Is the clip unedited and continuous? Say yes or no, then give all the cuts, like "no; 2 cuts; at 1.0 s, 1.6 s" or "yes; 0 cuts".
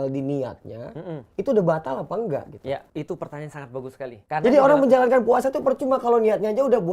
no; 2 cuts; at 2.9 s, 4.2 s